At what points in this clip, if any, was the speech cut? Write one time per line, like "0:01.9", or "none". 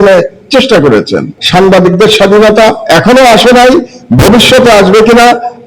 0:01.4